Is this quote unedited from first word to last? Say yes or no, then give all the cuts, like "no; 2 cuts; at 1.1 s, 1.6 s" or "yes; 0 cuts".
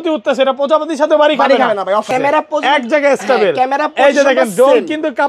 no; 1 cut; at 2.1 s